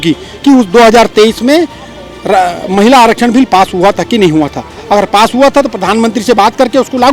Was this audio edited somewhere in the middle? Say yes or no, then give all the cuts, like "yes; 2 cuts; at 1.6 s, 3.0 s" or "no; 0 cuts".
no; 0 cuts